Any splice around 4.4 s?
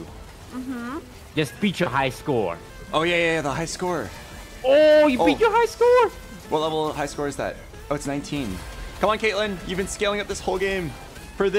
no; 2 cuts; at 1.2 s, 2.7 s

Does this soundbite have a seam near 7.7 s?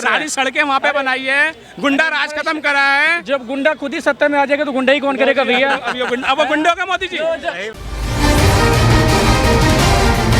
yes; 1 cut; at 7.7 s

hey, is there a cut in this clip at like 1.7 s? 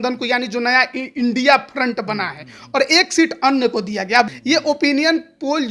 no; 1 cut; at 4.4 s

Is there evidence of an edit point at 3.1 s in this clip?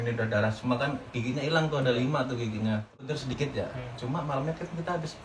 yes; 1 cut; at 3.1 s

